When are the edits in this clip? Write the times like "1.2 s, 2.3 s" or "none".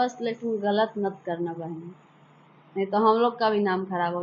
none

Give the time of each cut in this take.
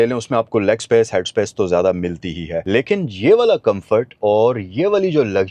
2.5 s

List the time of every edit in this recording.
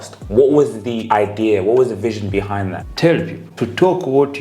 0.9 s, 2.8 s, 3.4 s

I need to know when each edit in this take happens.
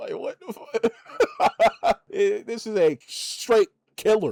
none

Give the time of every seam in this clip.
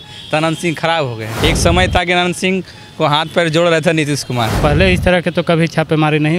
1.2 s, 4.5 s

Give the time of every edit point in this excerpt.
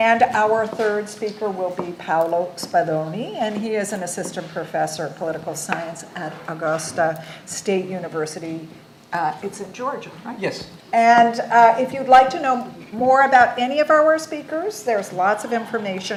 none

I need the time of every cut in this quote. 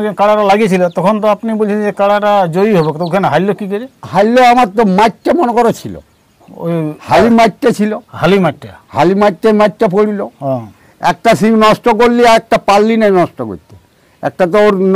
none

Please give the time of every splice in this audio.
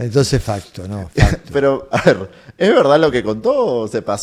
none

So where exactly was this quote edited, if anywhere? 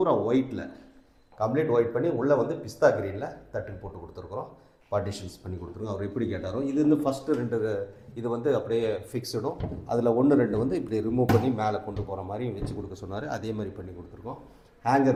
none

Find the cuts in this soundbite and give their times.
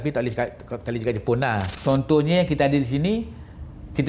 1.8 s

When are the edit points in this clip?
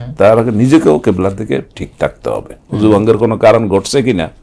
2.6 s

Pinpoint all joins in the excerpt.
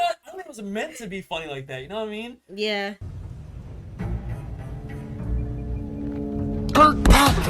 3.1 s

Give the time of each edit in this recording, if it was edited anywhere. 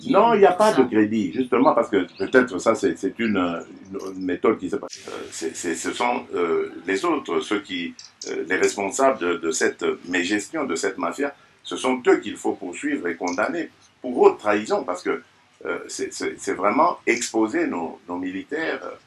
4.9 s

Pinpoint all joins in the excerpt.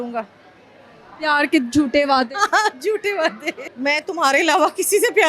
3.6 s

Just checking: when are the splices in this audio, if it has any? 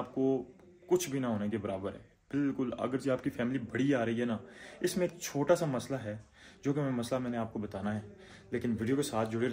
none

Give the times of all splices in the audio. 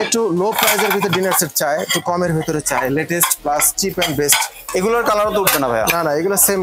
4.6 s

